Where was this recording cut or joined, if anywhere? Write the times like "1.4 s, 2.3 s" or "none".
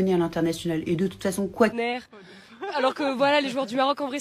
1.8 s